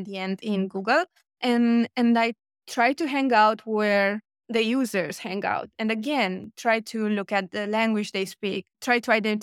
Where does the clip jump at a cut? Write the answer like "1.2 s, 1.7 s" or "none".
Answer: none